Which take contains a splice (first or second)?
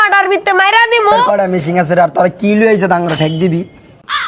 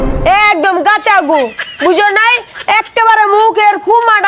first